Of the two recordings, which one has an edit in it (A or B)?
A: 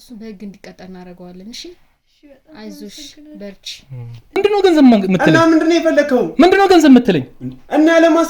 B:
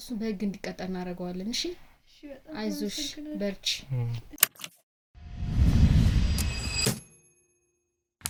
A